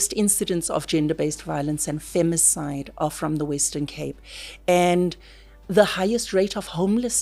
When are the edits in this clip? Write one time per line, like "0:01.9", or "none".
none